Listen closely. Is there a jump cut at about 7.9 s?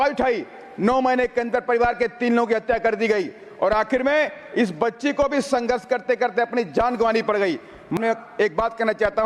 yes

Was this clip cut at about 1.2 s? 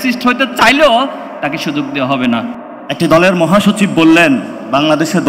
no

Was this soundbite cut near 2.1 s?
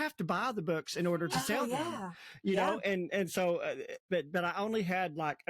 no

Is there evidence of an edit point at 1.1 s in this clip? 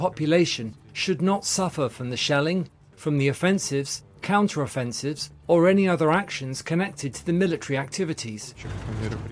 no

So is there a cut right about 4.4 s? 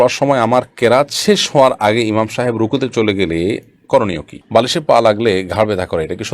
yes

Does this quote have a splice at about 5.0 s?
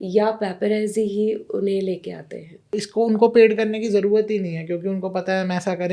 no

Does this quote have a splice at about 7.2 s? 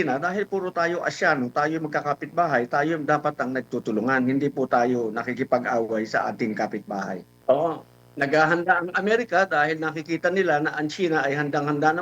yes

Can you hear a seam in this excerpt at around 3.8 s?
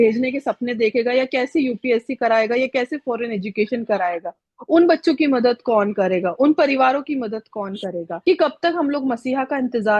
no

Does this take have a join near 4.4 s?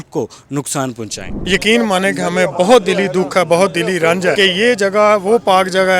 yes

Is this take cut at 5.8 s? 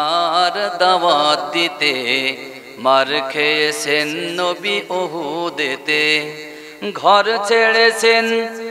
no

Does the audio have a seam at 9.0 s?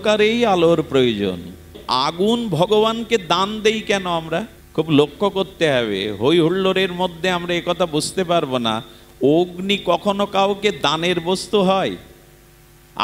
no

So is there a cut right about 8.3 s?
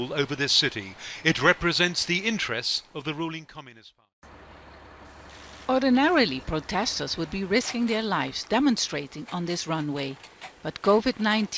no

